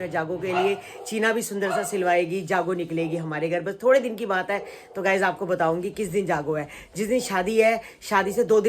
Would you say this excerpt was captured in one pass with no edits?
yes; 0 cuts

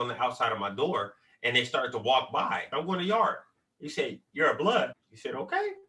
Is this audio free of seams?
no; 2 cuts; at 2.7 s, 4.8 s

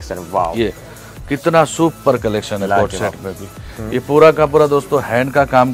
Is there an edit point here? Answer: no; 0 cuts

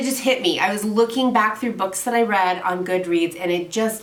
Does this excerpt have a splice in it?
no; 0 cuts

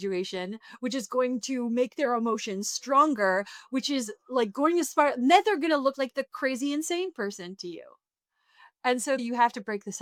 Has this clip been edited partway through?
no; 0 cuts

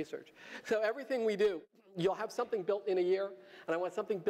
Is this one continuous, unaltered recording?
yes; 0 cuts

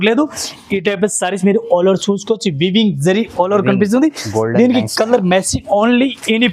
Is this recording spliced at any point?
no; 0 cuts

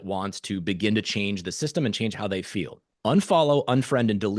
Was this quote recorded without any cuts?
no; 1 cut; at 2.8 s

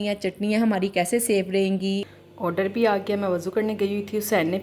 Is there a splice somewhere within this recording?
yes; 1 cut; at 2.1 s

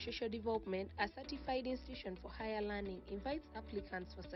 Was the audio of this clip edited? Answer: no; 0 cuts

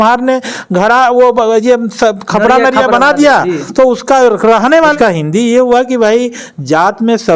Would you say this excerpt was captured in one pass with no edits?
no; 1 cut; at 4.9 s

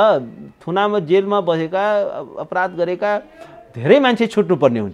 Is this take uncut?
yes; 0 cuts

